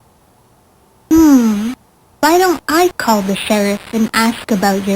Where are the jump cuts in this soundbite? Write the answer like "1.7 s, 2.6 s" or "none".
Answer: 1.1 s